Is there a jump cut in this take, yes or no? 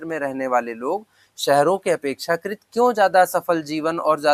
no